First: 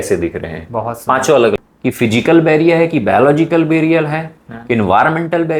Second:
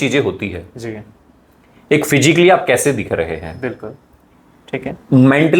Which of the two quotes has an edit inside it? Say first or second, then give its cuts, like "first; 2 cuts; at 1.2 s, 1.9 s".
first; 1 cut; at 1.6 s